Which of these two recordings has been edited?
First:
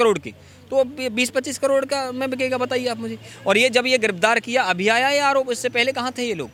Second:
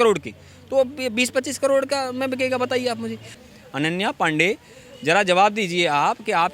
second; 1 cut; at 3.3 s

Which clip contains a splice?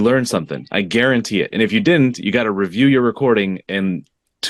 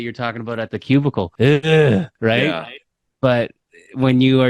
second; 2 cuts; at 1.3 s, 2.1 s

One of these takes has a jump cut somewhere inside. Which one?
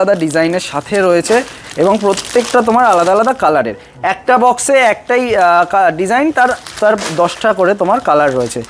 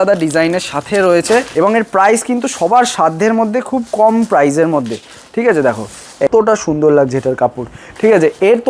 second; 2 cuts; at 1.5 s, 6.3 s

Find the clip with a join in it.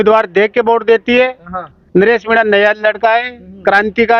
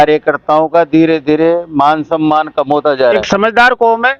second; 1 cut; at 3.2 s

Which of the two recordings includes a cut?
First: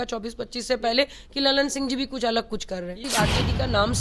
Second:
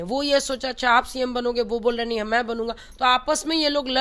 first; 1 cut; at 3.0 s

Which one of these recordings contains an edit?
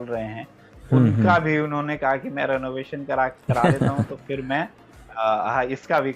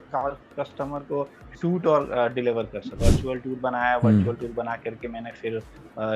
second; 1 cut; at 3.0 s

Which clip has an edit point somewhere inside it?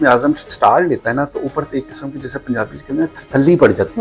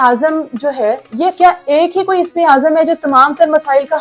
second; 1 cut; at 1.1 s

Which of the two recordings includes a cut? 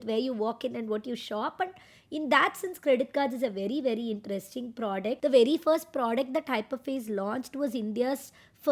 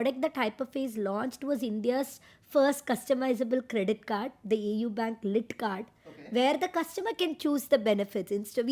first; 1 cut; at 5.2 s

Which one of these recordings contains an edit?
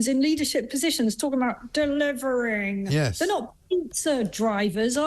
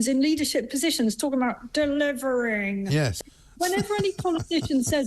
second; 1 cut; at 3.1 s

